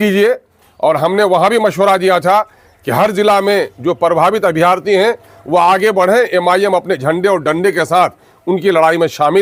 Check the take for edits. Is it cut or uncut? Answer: uncut